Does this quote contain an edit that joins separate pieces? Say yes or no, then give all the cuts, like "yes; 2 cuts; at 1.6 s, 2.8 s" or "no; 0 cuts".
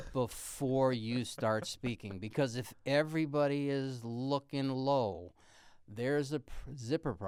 no; 0 cuts